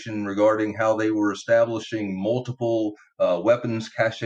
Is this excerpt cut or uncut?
uncut